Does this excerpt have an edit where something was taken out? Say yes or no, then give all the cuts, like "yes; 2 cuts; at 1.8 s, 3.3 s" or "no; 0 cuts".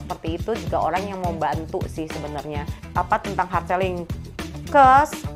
yes; 1 cut; at 2.8 s